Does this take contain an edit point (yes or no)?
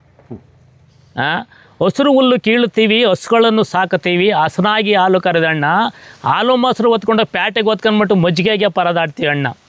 no